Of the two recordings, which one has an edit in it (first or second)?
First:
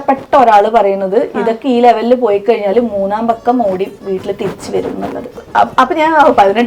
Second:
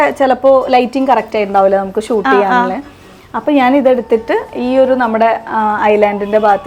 first